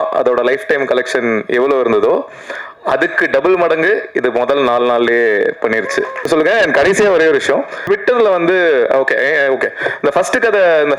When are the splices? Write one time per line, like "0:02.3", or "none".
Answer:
0:06.2
0:07.8